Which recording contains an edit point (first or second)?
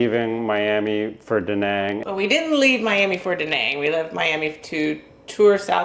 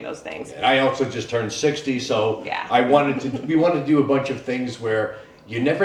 first